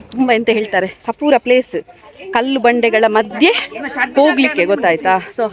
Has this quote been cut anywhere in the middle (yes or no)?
no